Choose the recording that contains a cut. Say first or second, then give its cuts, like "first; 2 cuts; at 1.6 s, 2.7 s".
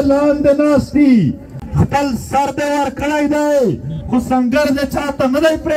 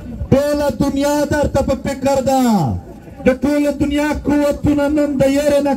first; 1 cut; at 1.5 s